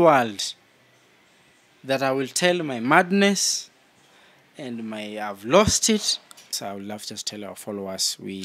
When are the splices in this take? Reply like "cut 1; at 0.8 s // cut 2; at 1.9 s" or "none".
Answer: cut 1; at 6.6 s